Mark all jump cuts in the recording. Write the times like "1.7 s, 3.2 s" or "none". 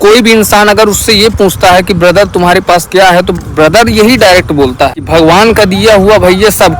5.0 s